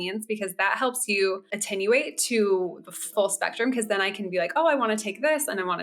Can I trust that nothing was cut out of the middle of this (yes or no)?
no